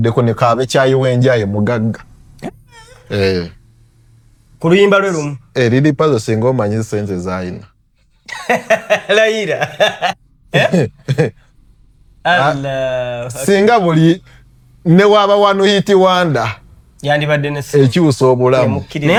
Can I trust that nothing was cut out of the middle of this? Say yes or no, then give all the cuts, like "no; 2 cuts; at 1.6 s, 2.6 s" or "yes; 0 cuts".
yes; 0 cuts